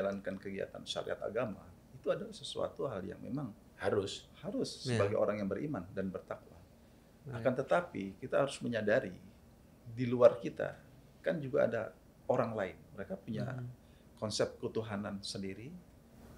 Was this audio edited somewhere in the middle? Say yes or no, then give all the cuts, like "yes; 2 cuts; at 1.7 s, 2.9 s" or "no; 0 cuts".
yes; 1 cut; at 12.9 s